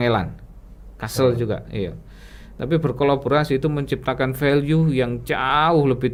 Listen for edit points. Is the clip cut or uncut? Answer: uncut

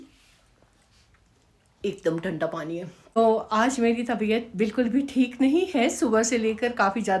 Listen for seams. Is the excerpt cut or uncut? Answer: cut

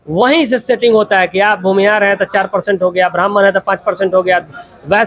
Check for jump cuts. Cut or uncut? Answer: uncut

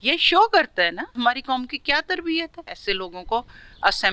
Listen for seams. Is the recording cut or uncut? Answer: cut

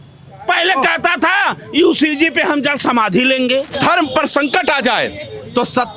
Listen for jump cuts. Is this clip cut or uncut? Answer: cut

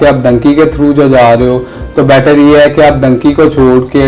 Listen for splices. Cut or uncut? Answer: uncut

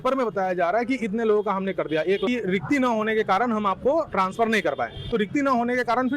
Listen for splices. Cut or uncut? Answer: cut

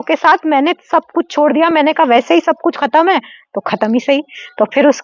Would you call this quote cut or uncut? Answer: uncut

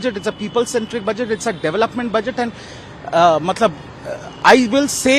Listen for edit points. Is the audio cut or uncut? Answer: uncut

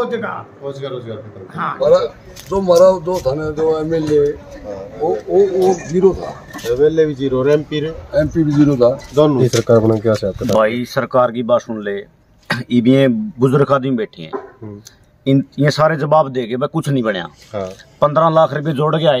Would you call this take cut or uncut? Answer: cut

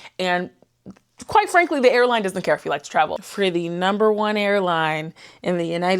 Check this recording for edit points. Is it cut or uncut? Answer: cut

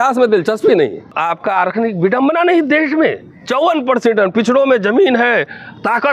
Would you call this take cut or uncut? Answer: cut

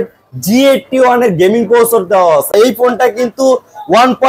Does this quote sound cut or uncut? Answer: cut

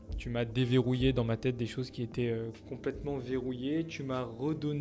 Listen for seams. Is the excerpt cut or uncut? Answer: cut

